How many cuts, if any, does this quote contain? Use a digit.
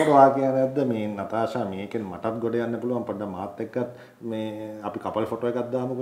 0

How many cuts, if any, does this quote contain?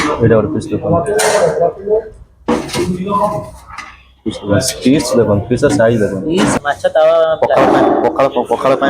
1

